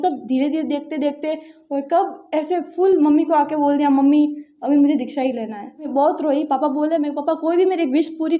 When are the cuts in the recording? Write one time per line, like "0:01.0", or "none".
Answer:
0:05.9